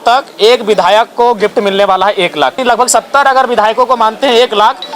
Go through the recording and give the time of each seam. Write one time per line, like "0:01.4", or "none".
0:02.6